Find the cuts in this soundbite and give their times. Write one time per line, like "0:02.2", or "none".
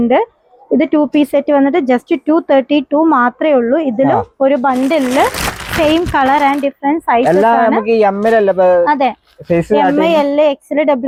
none